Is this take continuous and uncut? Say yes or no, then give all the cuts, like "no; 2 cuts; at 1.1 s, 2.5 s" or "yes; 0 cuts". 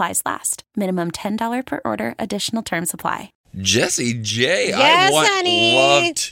yes; 0 cuts